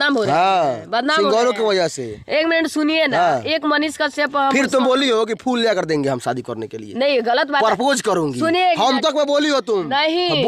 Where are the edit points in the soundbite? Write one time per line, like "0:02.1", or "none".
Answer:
none